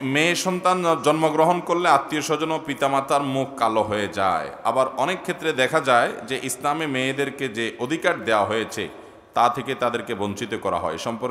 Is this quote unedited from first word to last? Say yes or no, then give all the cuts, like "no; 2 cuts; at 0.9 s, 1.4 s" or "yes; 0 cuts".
yes; 0 cuts